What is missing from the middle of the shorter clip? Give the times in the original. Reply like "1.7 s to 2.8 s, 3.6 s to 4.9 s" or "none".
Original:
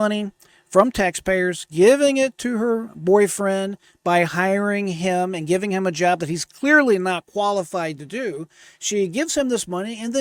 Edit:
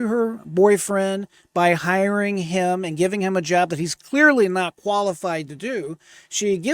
none